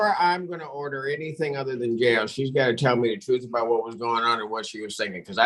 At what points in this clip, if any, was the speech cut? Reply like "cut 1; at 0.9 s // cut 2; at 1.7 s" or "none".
none